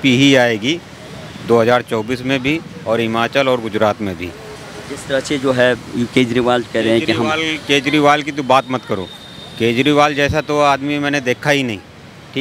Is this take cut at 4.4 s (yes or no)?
no